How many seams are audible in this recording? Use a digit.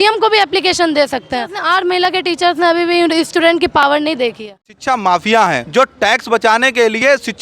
3